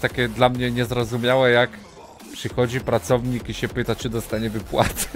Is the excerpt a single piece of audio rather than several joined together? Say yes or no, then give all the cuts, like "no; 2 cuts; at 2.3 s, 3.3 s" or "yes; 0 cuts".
yes; 0 cuts